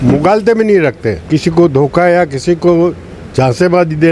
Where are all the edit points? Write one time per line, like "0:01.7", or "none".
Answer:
0:01.1